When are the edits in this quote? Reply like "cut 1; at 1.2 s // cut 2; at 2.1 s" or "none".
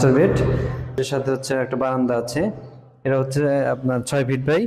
cut 1; at 1.0 s